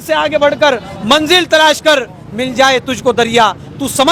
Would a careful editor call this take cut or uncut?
uncut